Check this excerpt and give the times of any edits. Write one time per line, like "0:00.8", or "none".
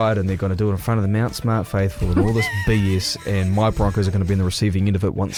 none